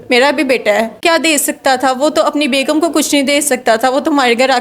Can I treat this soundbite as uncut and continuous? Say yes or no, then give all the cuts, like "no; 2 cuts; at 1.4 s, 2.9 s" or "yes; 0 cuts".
no; 1 cut; at 1.0 s